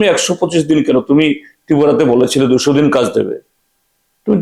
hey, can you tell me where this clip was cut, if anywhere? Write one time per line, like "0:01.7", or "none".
none